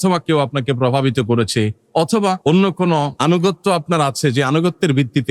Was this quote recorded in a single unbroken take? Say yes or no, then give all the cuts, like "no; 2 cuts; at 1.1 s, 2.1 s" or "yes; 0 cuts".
no; 2 cuts; at 2.4 s, 3.1 s